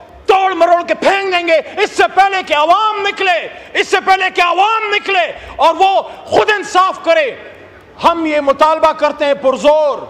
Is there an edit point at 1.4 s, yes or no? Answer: no